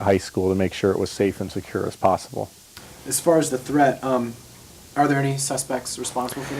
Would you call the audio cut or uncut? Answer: uncut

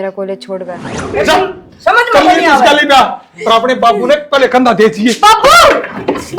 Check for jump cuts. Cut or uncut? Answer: cut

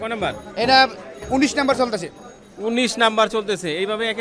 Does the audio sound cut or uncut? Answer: uncut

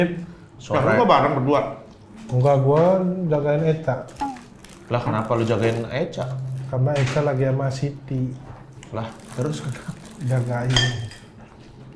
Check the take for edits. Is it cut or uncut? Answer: uncut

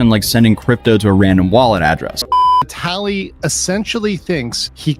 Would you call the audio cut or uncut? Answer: cut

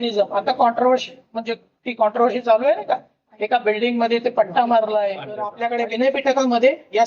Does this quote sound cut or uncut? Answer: cut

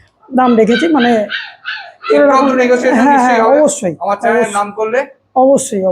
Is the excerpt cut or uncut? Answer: uncut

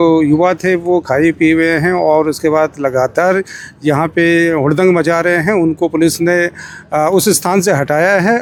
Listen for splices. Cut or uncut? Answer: uncut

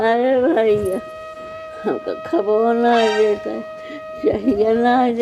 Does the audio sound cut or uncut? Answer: uncut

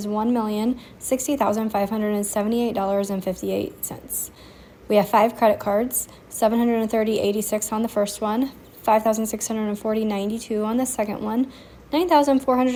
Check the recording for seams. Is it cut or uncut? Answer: uncut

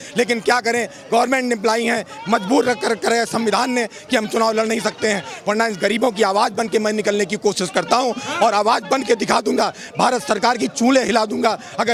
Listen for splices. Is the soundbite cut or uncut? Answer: uncut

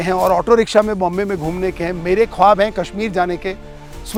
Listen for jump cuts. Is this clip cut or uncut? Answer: uncut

